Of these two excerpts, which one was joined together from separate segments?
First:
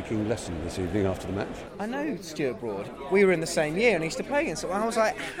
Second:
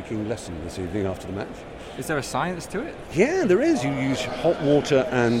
first; 2 cuts; at 1.6 s, 2.8 s

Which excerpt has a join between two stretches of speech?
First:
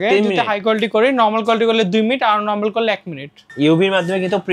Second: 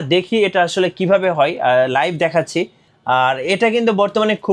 first; 1 cut; at 3.4 s

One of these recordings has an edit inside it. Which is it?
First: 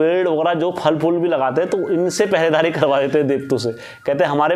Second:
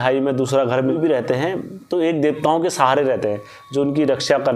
second; 1 cut; at 0.9 s

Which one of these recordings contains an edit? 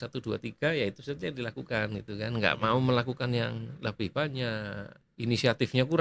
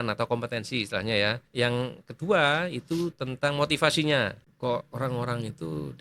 second; 1 cut; at 4.4 s

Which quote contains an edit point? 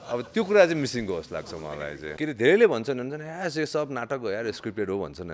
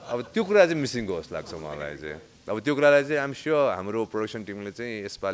first; 1 cut; at 2.1 s

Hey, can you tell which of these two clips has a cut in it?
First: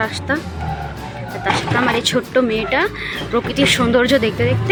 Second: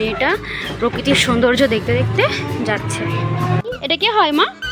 second; 1 cut; at 3.6 s

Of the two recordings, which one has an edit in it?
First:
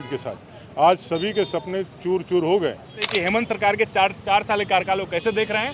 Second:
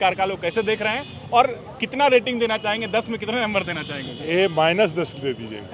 first; 1 cut; at 3.0 s

